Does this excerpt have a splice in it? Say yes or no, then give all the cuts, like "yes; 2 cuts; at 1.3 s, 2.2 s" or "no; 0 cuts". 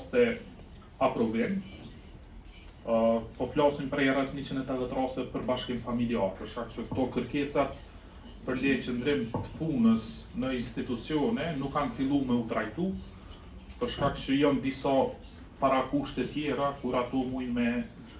no; 0 cuts